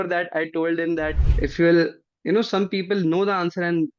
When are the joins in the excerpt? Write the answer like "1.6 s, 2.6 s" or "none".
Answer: 1.2 s

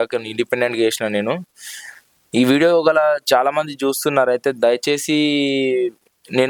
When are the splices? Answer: none

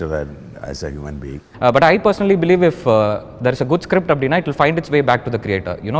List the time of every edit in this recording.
1.3 s

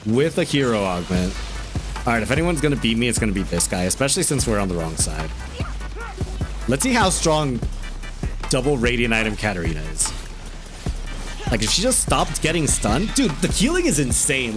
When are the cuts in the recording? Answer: none

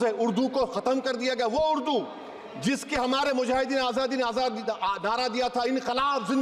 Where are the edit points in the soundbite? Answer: none

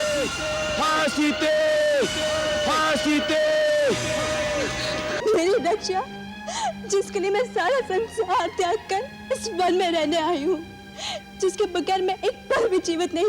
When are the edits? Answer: 5.2 s

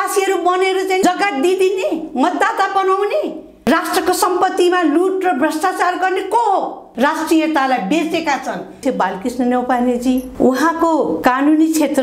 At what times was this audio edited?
6.8 s, 8.8 s

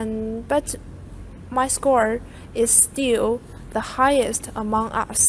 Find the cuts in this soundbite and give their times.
1.9 s

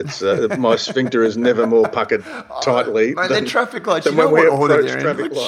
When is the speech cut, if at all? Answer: none

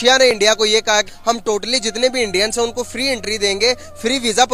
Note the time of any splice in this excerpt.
1.1 s

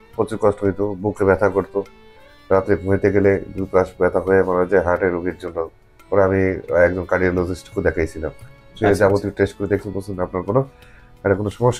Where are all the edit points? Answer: none

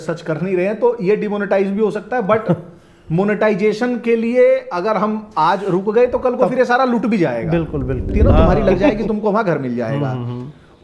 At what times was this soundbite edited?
8.1 s

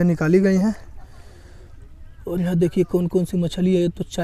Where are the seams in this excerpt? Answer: none

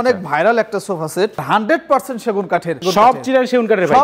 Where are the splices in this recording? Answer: 1.4 s, 2.8 s

